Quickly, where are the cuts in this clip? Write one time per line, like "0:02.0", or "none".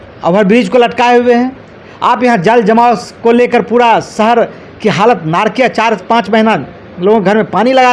none